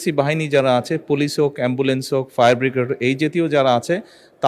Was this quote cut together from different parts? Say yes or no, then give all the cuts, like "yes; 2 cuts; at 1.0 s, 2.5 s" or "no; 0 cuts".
no; 0 cuts